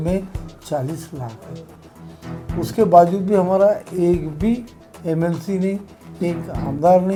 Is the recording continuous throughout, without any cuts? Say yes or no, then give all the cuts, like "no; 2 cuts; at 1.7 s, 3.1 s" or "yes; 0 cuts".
yes; 0 cuts